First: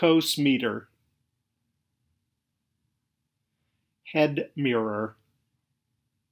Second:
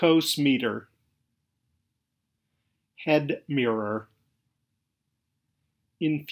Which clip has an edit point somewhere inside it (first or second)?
second